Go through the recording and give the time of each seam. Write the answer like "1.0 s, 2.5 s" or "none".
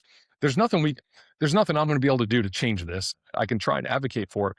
3.1 s